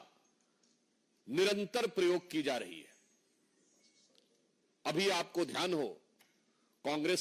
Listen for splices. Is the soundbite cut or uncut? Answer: uncut